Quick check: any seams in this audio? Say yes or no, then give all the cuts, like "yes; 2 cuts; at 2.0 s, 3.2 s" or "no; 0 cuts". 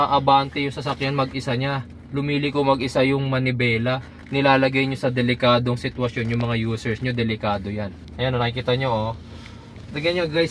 yes; 1 cut; at 8.0 s